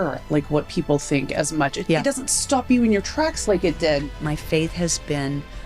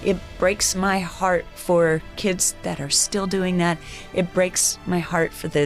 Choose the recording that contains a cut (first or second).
first